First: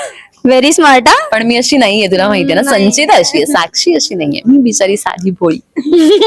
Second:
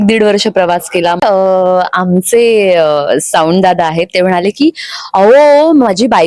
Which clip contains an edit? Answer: second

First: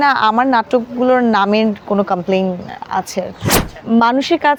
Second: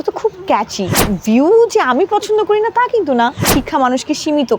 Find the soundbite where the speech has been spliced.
second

